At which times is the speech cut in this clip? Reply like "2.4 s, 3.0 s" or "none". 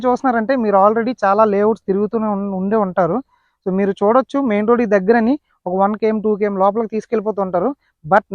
none